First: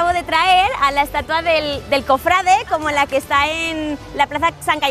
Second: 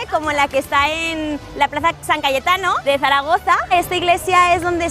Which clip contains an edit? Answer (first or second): second